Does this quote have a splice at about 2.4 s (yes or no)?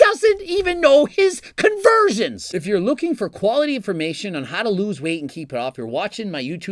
yes